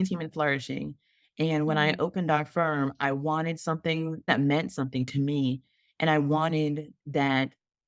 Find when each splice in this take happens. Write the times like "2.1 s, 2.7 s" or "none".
4.3 s